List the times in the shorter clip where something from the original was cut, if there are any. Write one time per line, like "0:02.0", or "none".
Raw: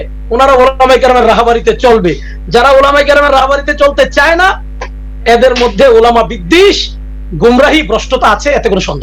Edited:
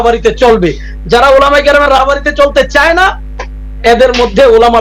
none